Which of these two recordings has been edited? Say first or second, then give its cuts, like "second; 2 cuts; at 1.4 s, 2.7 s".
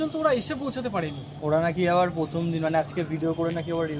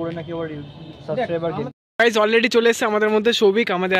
second; 1 cut; at 1.7 s